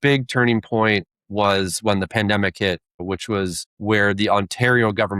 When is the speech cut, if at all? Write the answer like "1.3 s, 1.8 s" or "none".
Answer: 1.1 s, 3.2 s